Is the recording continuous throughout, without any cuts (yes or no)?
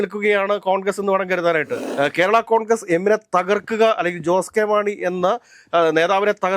no